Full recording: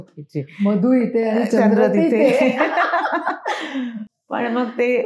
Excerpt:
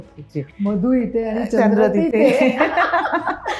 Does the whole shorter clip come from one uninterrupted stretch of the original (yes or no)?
yes